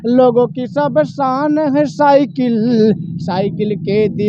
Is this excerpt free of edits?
yes; 0 cuts

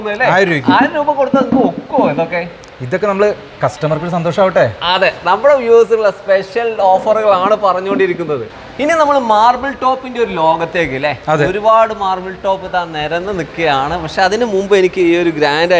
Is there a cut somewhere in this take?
no; 0 cuts

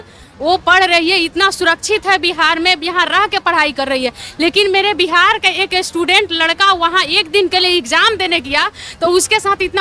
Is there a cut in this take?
no; 0 cuts

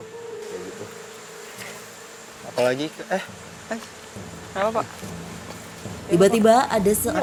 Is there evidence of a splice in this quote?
no; 0 cuts

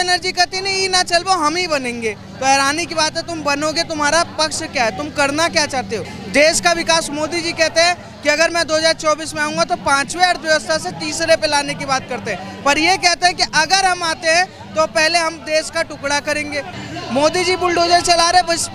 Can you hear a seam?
yes; 2 cuts; at 6.1 s, 16.8 s

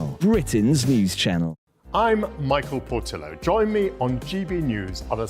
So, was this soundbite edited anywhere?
yes; 1 cut; at 1.6 s

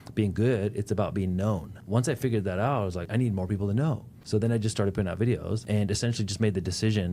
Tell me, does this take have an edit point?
yes; 4 cuts; at 1.8 s, 3.1 s, 4.1 s, 5.6 s

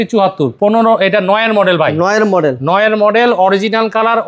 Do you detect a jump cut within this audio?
no; 0 cuts

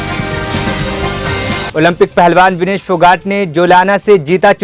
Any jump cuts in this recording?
no; 0 cuts

